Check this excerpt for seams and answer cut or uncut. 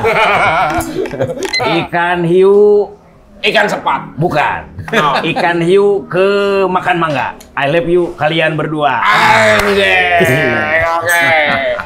cut